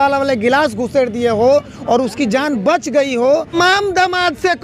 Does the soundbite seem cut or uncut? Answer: cut